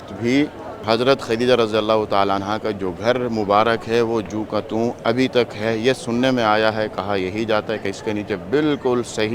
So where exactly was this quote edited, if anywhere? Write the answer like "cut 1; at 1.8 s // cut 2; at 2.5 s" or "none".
none